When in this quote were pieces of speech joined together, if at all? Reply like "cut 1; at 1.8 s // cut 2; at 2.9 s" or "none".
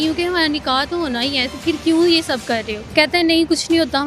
cut 1; at 2.8 s